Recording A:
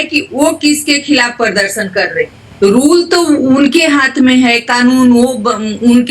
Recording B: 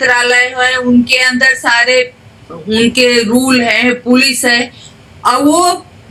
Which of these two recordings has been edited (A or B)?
A